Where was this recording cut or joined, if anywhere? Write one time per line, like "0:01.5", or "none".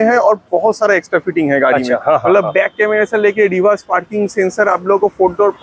none